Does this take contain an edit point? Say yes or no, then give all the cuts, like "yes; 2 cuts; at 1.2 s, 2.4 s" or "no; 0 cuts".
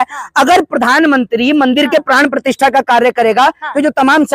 no; 0 cuts